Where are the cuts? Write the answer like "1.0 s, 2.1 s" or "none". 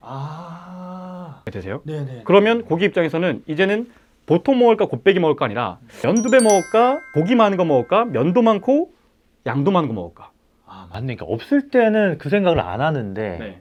none